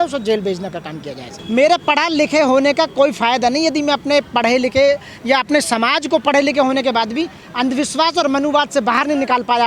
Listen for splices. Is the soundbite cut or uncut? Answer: uncut